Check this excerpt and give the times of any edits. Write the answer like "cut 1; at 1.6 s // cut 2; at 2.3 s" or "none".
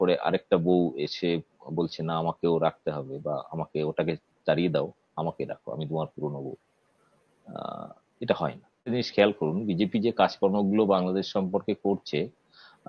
cut 1; at 8.9 s